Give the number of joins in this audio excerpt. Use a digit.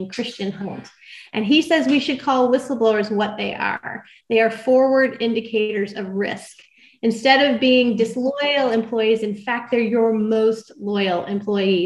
0